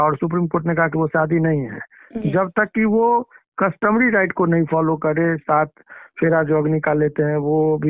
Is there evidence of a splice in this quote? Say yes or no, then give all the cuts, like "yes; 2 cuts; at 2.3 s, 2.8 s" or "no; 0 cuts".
no; 0 cuts